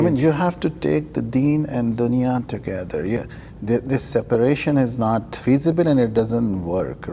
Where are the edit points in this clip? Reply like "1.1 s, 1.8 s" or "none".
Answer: none